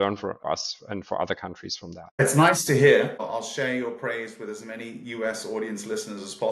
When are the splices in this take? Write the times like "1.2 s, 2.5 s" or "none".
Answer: 3.2 s